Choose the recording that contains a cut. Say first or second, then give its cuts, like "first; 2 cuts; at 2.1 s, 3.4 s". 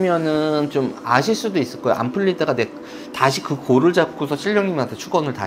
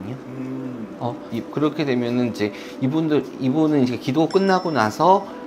second; 1 cut; at 1.3 s